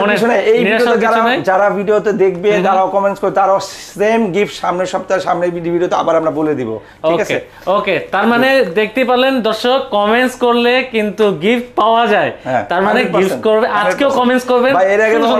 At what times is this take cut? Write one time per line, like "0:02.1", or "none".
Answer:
none